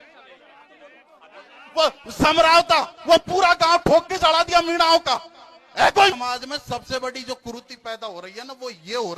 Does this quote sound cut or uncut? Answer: cut